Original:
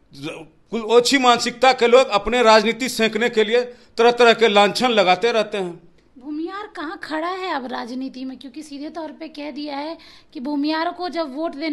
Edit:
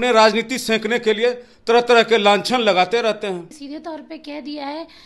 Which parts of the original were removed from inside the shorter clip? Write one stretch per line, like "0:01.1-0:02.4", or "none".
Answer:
0:05.9-0:08.7